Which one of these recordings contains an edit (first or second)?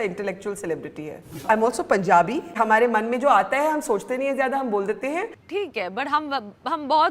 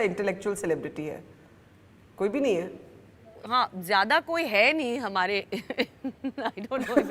first